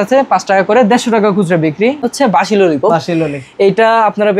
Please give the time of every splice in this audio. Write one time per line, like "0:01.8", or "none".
0:02.0